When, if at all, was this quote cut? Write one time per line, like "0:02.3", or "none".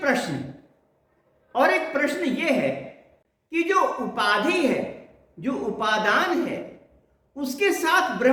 none